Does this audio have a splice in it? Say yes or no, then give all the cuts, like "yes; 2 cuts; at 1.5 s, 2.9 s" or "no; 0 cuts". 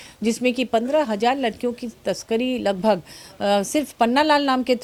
no; 0 cuts